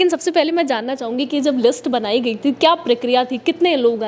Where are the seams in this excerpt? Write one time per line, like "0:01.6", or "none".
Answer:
none